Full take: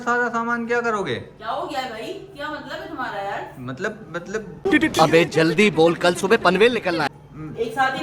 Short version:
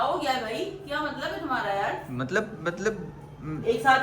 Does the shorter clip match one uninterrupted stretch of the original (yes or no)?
no